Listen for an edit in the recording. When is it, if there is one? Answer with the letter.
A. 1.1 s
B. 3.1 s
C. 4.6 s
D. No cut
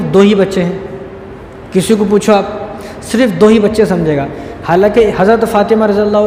D